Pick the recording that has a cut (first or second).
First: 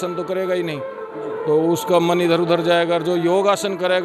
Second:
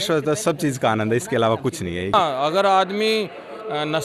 second